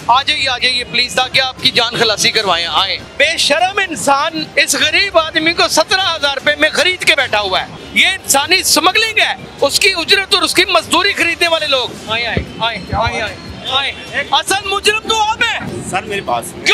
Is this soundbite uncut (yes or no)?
no